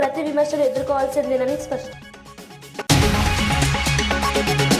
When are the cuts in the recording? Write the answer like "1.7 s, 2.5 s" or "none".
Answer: 1.9 s